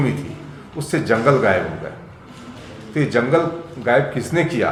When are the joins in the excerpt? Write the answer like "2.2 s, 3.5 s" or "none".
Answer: none

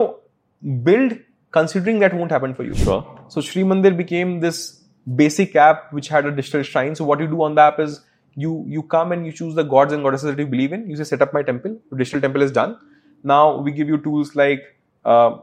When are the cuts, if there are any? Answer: 2.7 s

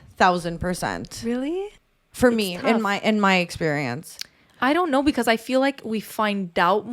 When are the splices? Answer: 1.7 s

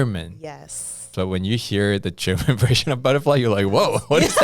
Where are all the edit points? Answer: 1.1 s

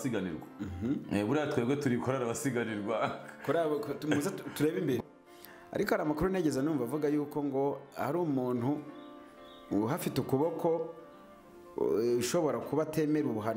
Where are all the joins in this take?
5.0 s

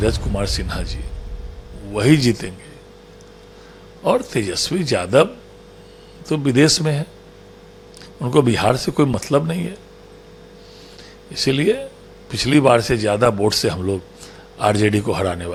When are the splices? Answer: none

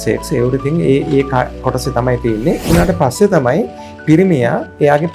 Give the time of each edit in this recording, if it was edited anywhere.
2.6 s

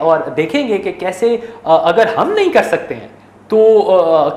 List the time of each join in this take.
none

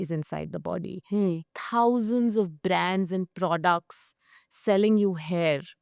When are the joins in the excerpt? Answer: 1.4 s

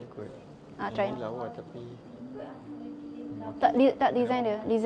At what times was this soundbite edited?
none

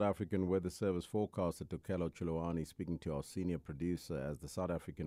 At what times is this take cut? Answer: none

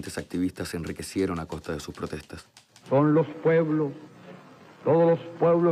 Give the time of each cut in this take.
1.6 s

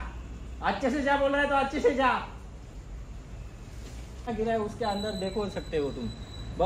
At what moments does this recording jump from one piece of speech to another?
4.3 s

